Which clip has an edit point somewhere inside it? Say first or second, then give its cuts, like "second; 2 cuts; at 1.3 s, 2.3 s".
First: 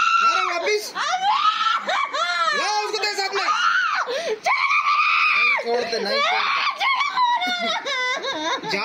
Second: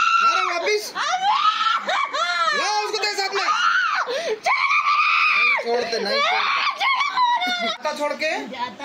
second; 1 cut; at 7.8 s